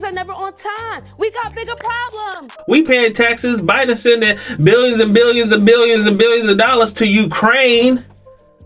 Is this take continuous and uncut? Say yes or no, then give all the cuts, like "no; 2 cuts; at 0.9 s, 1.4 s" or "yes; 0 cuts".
no; 1 cut; at 2.5 s